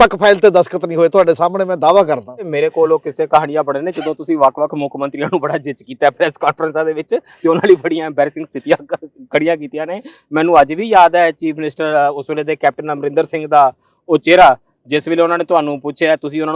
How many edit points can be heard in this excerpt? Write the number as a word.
one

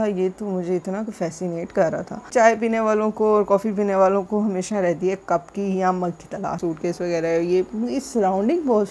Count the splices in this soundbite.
two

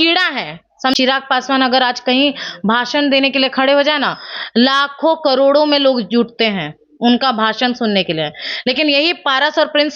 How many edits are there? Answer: one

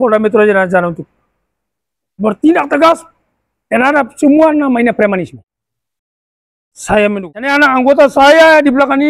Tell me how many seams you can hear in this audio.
zero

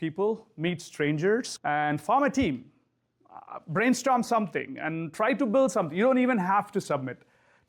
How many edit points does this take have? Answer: zero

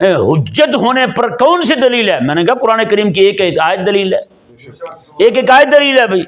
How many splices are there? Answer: zero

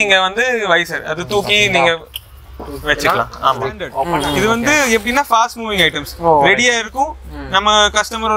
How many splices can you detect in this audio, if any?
one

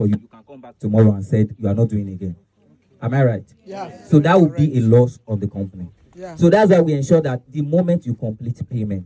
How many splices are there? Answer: zero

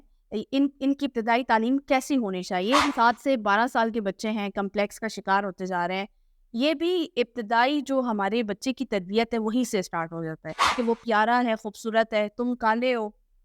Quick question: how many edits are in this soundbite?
two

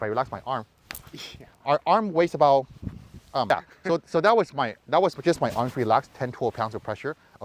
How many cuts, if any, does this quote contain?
one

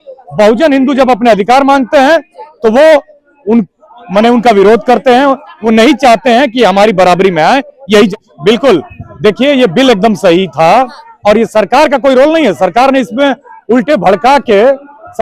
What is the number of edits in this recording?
one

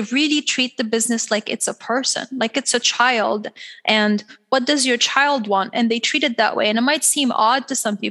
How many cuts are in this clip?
zero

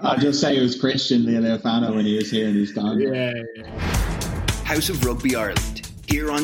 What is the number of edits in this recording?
one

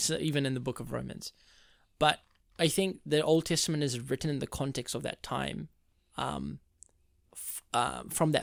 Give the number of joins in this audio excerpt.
zero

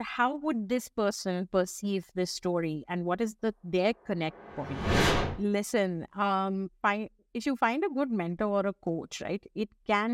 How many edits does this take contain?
one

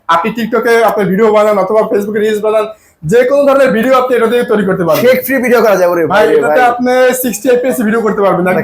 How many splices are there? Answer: zero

